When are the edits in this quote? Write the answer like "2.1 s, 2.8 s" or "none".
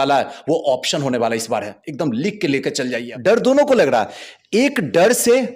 3.0 s